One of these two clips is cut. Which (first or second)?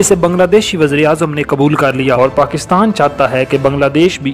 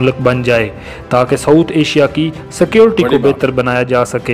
first